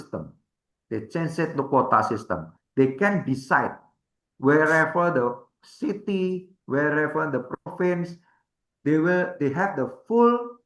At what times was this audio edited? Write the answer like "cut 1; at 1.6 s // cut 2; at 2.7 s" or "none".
cut 1; at 2.6 s